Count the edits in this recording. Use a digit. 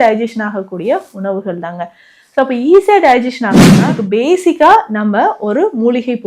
1